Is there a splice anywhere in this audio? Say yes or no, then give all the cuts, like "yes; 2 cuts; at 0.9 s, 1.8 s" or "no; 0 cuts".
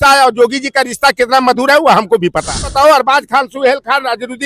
yes; 1 cut; at 2.7 s